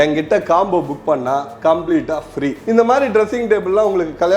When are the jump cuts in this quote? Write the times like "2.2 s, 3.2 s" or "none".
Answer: 2.6 s